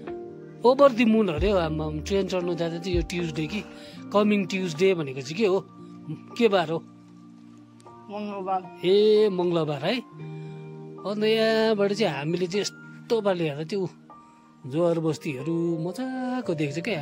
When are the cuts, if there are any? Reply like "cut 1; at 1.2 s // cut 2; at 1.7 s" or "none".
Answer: none